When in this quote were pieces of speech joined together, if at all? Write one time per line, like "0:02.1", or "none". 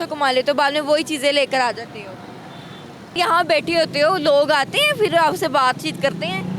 none